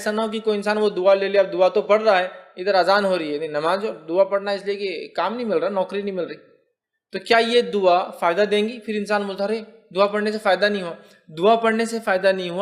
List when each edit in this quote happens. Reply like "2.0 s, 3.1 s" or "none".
none